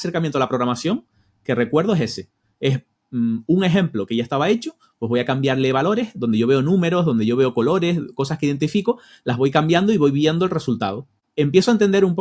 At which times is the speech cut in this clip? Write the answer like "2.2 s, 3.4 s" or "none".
11.2 s

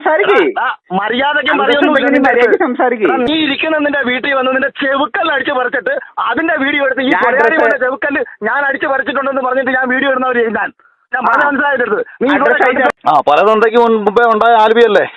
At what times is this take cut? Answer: 12.9 s

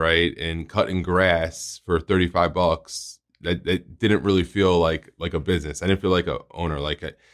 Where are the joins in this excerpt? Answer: none

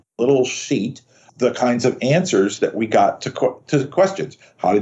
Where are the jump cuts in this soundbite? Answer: 1.3 s

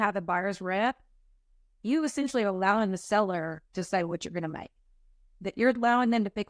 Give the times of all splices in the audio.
none

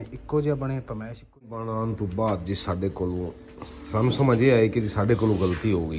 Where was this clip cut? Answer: 1.6 s

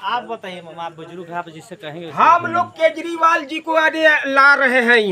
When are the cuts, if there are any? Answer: none

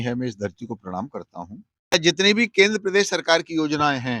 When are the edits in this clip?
1.9 s

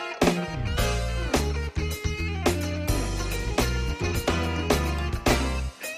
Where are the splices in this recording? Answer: none

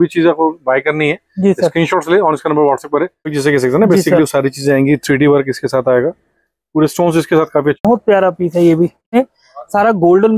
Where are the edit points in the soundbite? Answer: 3.3 s, 7.8 s, 9.1 s

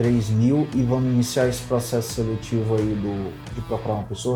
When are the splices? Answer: none

